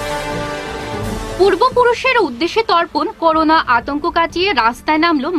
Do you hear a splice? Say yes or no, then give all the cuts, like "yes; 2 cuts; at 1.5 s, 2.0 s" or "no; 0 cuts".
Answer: yes; 1 cut; at 1.0 s